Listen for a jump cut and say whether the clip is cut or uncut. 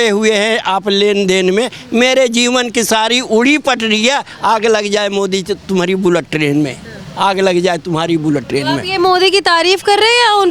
uncut